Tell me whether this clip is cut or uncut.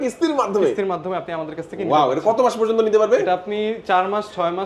uncut